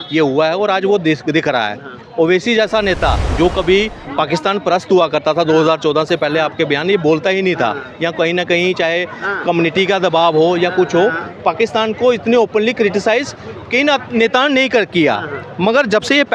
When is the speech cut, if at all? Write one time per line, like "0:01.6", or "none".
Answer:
0:03.2